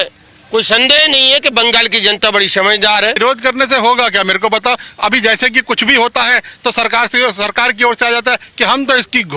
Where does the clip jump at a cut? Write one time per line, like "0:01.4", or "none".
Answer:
0:03.2